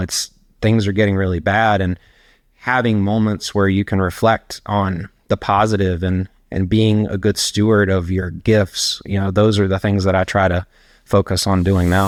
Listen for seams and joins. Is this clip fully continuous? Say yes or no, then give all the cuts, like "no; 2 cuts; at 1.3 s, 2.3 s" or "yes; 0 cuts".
yes; 0 cuts